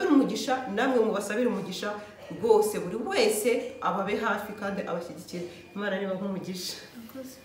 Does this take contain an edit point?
no; 0 cuts

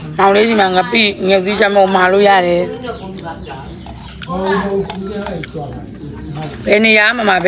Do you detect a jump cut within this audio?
no; 0 cuts

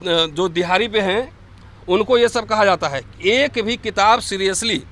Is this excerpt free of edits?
yes; 0 cuts

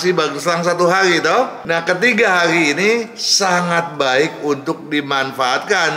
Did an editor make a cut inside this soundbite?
yes; 1 cut; at 1.6 s

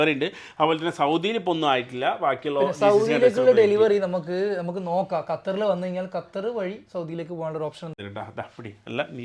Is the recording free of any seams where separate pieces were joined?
no; 1 cut; at 8.0 s

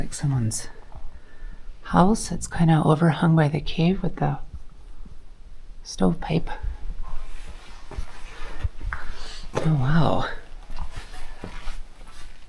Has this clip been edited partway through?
no; 0 cuts

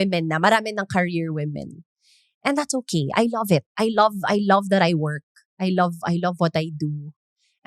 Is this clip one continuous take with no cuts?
yes; 0 cuts

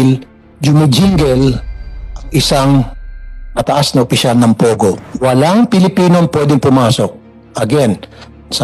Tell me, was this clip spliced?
yes; 1 cut; at 5.0 s

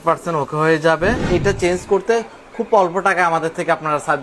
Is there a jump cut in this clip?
yes; 1 cut; at 1.2 s

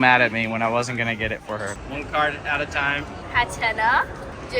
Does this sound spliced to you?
yes; 1 cut; at 1.8 s

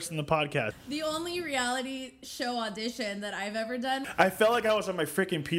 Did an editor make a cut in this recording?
yes; 2 cuts; at 0.7 s, 4.1 s

